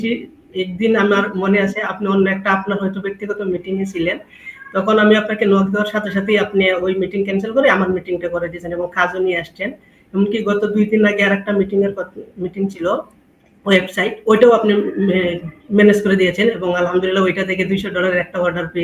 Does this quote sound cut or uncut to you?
uncut